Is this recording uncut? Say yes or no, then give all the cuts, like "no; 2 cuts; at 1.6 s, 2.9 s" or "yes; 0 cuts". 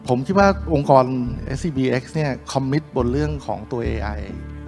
no; 1 cut; at 1.5 s